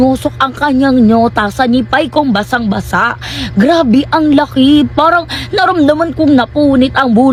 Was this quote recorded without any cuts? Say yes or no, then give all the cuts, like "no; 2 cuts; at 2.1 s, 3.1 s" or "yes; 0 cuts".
yes; 0 cuts